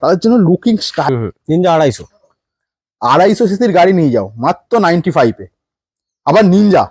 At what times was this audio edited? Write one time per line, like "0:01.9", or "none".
0:01.1